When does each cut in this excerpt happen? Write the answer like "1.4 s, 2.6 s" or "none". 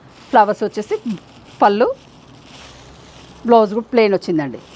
none